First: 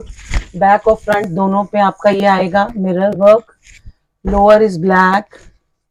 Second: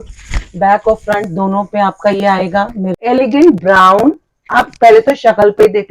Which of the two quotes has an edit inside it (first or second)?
second